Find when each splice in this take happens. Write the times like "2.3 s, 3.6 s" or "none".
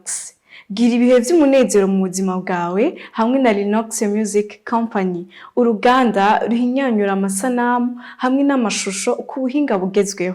none